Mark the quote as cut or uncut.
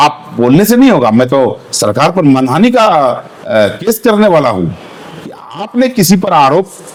uncut